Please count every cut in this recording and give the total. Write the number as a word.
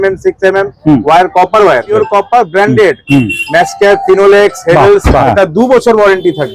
two